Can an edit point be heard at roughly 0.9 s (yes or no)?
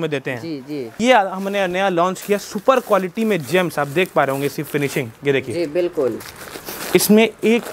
yes